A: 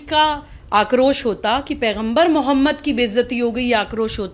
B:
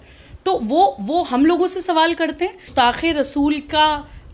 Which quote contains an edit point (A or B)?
B